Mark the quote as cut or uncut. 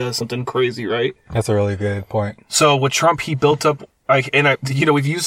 uncut